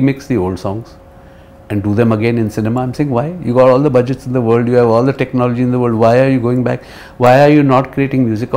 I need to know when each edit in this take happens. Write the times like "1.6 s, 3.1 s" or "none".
none